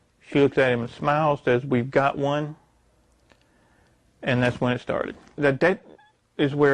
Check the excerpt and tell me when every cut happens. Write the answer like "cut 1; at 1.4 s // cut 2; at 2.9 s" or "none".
cut 1; at 5.4 s